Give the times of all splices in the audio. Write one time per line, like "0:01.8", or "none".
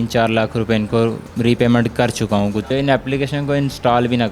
0:01.3
0:02.7